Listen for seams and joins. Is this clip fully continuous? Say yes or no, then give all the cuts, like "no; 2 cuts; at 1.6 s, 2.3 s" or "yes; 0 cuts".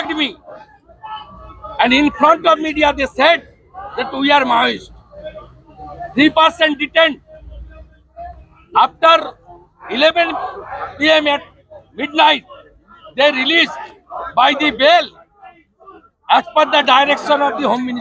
yes; 0 cuts